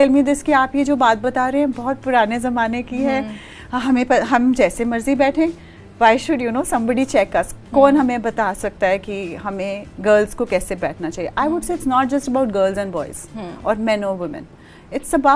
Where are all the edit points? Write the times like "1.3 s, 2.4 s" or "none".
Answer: none